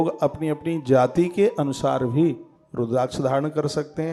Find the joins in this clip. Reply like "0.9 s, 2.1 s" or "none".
none